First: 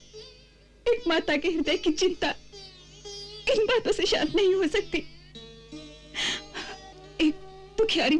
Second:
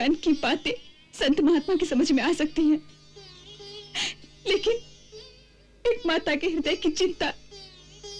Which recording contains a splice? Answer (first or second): first